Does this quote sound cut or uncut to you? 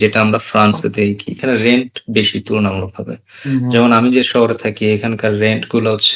cut